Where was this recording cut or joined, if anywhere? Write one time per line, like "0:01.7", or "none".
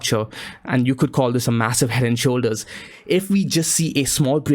0:02.9